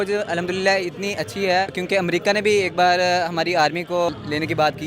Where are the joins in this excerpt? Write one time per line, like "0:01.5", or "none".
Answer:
0:01.8
0:04.1